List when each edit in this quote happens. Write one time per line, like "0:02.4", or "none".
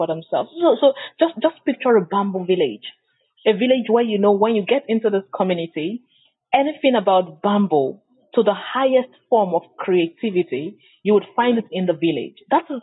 none